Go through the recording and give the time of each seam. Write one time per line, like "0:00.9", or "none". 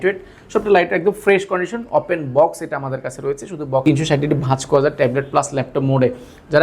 0:03.8